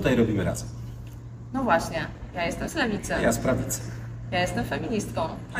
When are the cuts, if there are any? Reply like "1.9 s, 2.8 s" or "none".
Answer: none

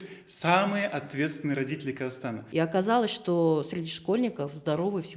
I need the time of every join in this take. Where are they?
2.4 s

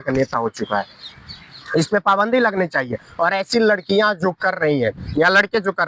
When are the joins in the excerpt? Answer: none

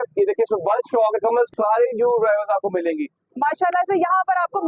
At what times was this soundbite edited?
1.5 s, 3.2 s

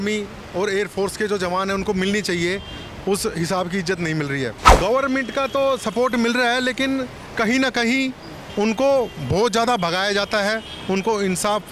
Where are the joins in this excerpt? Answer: 4.6 s

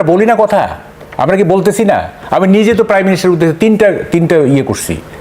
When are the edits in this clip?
none

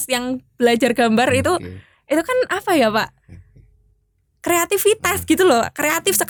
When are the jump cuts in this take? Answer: none

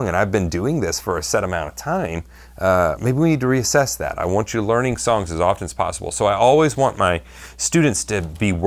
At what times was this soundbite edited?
none

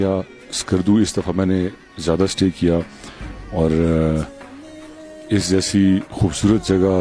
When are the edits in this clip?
none

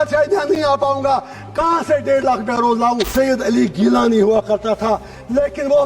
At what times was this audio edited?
3.1 s

